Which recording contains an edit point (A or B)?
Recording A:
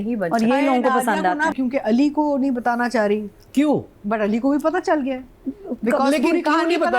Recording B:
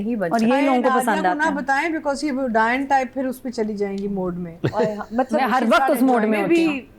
A